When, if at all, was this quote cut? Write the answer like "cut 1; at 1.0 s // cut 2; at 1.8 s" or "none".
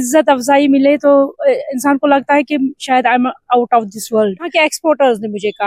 cut 1; at 4.5 s